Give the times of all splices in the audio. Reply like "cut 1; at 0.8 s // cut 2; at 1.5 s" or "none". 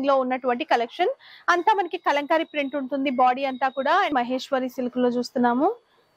cut 1; at 4.1 s